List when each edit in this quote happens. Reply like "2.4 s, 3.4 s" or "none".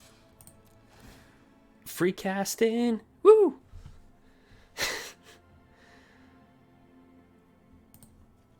none